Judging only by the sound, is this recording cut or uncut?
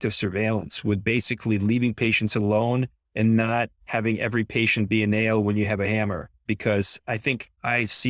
cut